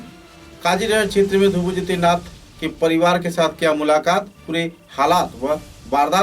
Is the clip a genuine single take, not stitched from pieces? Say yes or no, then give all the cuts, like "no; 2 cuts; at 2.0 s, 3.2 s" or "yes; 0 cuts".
yes; 0 cuts